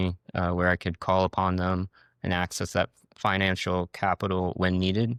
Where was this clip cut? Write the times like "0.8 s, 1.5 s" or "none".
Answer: none